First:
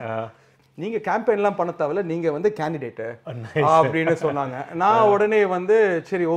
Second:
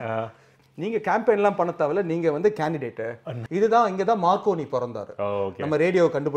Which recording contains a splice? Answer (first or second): second